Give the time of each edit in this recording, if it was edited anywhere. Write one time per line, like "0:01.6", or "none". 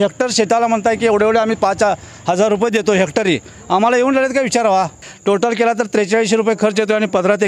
0:05.0